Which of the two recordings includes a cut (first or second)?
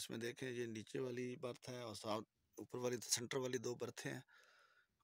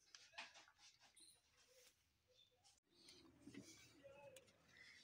second